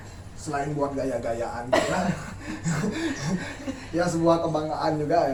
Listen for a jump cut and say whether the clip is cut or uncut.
uncut